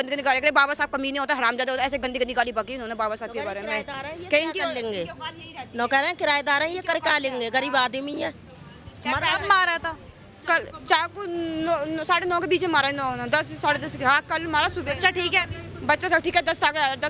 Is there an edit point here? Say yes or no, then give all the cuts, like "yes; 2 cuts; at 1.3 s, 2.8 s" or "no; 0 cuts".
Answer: no; 0 cuts